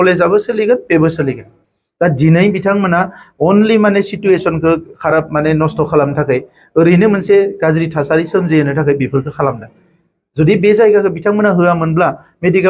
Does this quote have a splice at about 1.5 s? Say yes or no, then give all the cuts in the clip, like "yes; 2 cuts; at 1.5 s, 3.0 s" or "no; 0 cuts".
yes; 1 cut; at 1.5 s